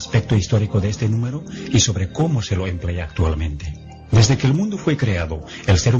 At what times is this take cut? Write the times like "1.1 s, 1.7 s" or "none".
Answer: 2.3 s